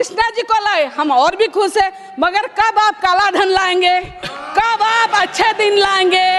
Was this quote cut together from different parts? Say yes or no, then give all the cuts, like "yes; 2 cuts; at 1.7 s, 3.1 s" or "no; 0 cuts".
no; 0 cuts